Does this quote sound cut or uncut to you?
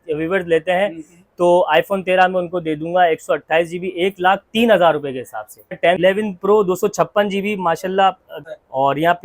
cut